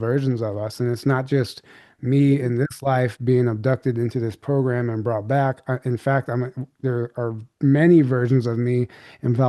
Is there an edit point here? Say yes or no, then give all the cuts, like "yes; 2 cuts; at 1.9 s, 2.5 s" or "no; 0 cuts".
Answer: no; 0 cuts